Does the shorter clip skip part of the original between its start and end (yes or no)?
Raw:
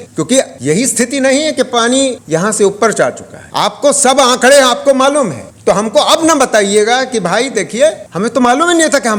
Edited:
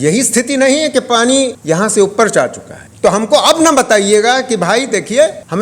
yes